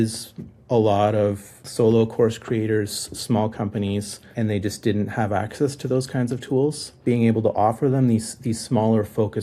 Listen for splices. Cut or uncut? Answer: cut